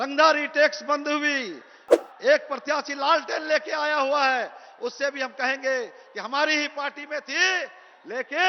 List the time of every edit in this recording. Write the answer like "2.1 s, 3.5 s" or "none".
1.9 s